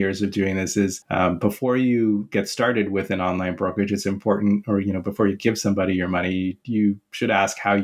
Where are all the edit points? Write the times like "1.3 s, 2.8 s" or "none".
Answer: 1.0 s, 6.6 s

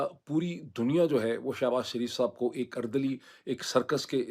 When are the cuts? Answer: none

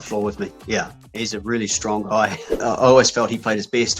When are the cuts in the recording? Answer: 1.0 s, 2.6 s

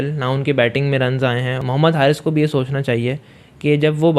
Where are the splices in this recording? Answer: 1.6 s

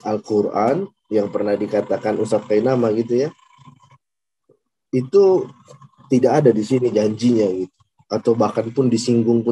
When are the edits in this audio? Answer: none

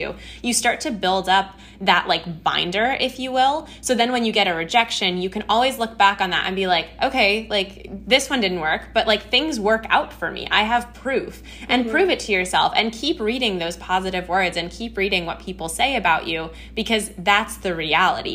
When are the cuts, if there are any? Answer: none

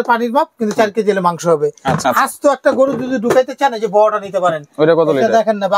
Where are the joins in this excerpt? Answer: 2.0 s

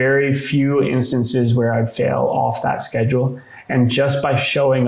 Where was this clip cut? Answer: none

